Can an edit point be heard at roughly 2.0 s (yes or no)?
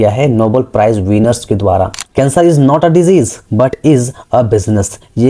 yes